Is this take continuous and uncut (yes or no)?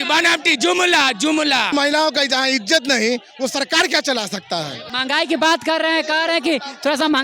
no